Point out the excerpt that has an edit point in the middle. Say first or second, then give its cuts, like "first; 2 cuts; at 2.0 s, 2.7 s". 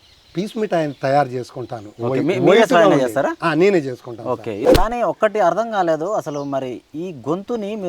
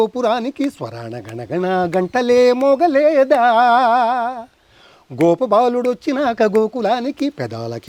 first; 1 cut; at 4.7 s